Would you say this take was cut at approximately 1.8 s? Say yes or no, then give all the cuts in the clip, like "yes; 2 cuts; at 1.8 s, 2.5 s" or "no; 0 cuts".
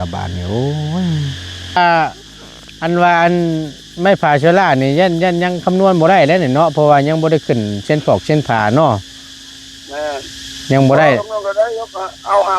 yes; 1 cut; at 1.8 s